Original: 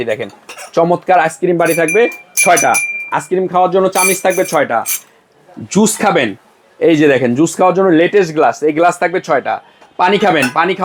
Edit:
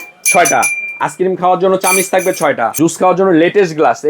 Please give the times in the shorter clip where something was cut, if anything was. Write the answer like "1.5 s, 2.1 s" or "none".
2.8 s